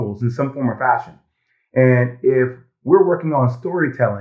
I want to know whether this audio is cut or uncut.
uncut